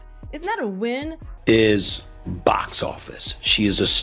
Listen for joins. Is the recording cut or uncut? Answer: cut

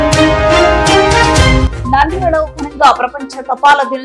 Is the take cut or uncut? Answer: cut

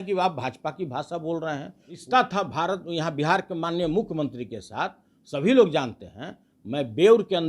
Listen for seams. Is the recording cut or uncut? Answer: cut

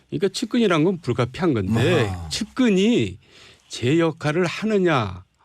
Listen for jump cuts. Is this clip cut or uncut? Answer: cut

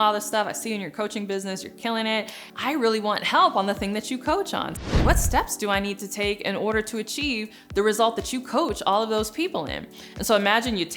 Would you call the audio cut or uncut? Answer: cut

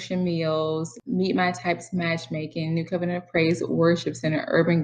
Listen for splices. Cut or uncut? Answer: cut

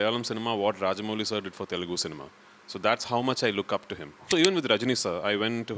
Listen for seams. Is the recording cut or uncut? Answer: cut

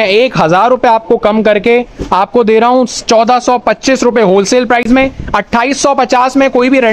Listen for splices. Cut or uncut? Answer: uncut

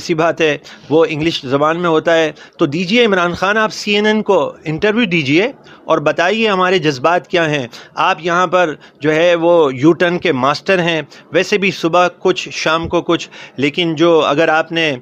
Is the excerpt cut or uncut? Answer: uncut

